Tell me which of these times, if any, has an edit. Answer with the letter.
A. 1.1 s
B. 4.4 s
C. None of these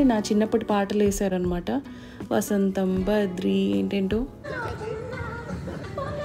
B